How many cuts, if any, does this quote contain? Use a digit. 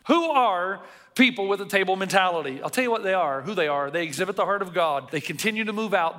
1